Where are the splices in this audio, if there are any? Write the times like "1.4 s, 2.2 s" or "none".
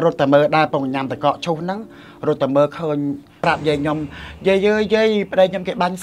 3.4 s